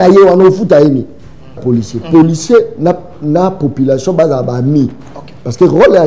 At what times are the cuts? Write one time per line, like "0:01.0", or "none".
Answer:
0:01.6